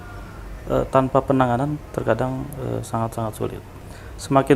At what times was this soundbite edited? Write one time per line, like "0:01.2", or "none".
0:03.7